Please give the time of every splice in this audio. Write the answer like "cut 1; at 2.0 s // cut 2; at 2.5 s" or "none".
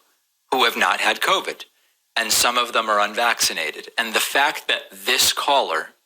cut 1; at 2.6 s // cut 2; at 4.1 s

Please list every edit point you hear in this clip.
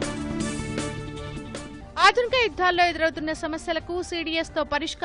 cut 1; at 1.8 s

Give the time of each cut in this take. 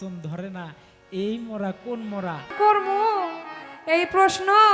cut 1; at 2.5 s

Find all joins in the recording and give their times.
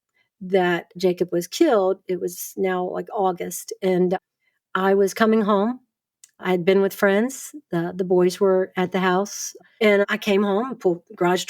cut 1; at 9.6 s

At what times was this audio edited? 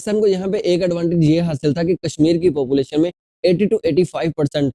none

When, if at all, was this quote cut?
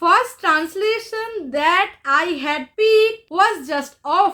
cut 1; at 2.7 s // cut 2; at 3.2 s

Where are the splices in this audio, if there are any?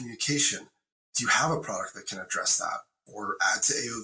cut 1; at 2.9 s

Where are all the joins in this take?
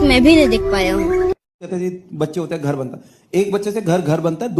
none

